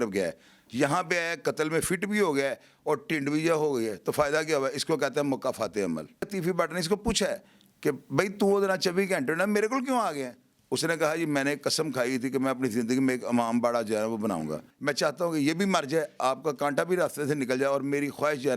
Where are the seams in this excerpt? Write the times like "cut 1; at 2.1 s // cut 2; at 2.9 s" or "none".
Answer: cut 1; at 6.2 s // cut 2; at 14.7 s